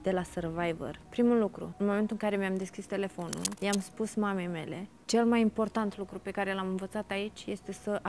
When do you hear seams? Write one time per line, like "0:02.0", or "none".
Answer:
0:01.0
0:01.6
0:03.5
0:05.0

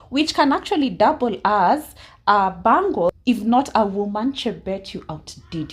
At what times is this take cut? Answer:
0:03.2

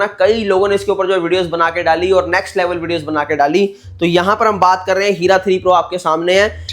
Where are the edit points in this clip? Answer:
none

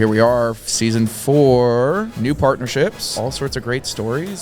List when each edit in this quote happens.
0:02.1
0:03.1

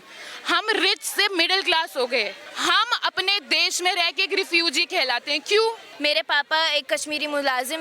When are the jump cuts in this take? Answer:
0:02.4
0:05.9

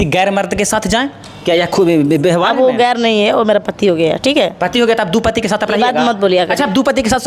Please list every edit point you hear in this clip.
none

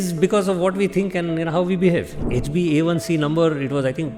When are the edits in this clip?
0:02.2

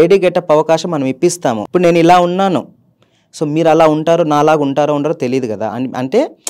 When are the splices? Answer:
0:01.6

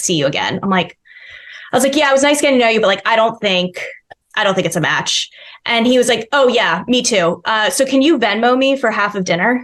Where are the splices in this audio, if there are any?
none

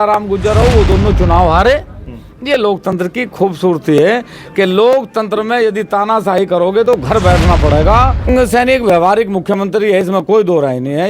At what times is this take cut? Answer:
0:08.3

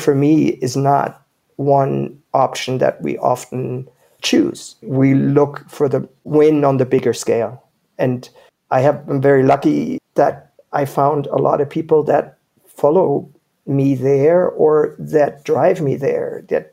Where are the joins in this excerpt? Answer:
0:02.2
0:06.2

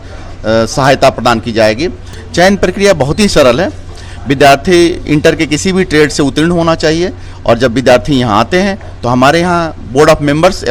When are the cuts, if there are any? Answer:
0:02.1

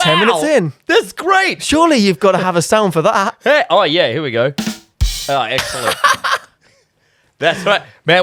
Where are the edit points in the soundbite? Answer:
none

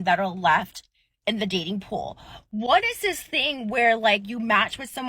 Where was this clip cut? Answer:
none

